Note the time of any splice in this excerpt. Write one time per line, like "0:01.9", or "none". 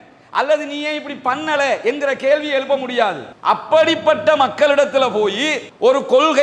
0:03.3